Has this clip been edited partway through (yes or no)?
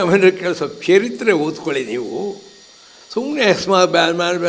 no